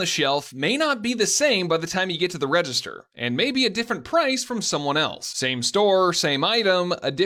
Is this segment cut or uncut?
uncut